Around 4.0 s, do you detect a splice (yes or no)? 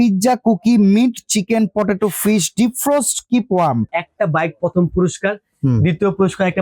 yes